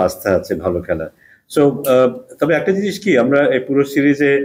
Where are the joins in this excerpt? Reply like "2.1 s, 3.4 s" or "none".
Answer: none